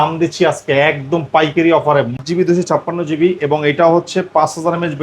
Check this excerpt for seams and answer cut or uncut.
cut